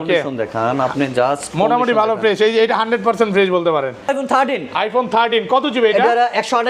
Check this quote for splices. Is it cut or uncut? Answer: cut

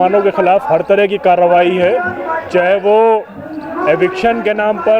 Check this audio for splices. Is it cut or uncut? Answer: uncut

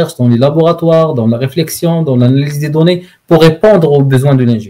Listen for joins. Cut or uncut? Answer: uncut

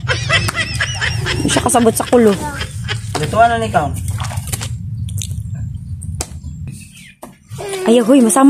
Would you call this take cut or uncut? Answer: cut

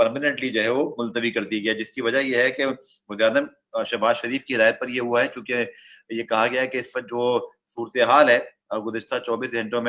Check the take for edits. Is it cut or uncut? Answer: uncut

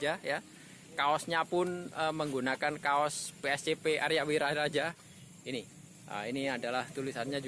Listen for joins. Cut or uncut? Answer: cut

